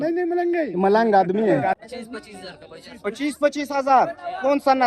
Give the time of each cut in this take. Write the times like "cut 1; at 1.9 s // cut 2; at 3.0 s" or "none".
cut 1; at 1.8 s